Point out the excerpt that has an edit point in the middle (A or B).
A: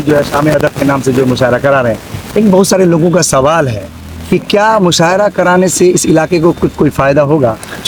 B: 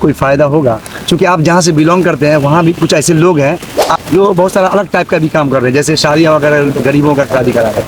B